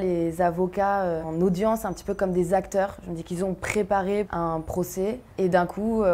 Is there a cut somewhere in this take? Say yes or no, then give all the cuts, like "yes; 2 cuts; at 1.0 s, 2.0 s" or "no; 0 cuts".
yes; 3 cuts; at 1.3 s, 4.3 s, 5.2 s